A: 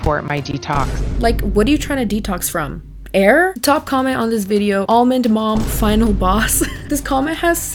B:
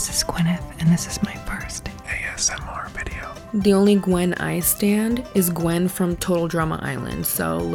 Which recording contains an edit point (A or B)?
B